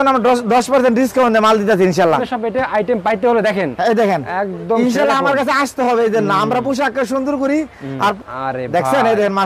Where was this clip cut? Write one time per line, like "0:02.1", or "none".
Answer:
0:02.2
0:08.2